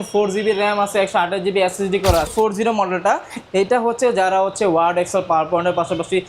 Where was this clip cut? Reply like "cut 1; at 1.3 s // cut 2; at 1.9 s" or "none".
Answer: cut 1; at 2.3 s